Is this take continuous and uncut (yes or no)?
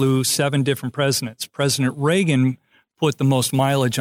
yes